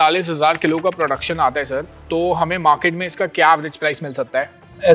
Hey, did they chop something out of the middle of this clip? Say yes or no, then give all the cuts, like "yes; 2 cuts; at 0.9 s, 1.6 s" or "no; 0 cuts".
no; 0 cuts